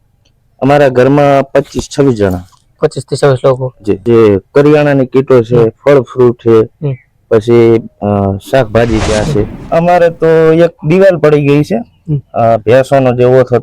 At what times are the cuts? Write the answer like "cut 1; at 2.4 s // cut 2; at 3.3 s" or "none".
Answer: cut 1; at 3.9 s // cut 2; at 9.6 s

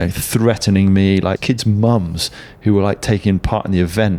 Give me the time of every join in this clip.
cut 1; at 1.4 s

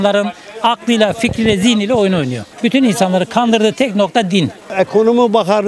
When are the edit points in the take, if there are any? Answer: cut 1; at 4.6 s

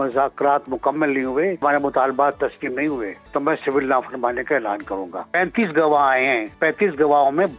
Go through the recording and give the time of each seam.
cut 1; at 1.6 s // cut 2; at 3.2 s // cut 3; at 5.2 s // cut 4; at 6.5 s

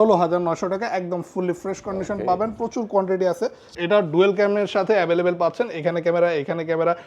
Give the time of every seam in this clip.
cut 1; at 3.7 s

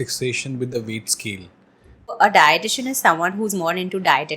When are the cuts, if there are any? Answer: cut 1; at 2.1 s

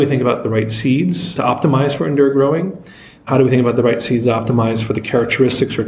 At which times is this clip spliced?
cut 1; at 1.3 s

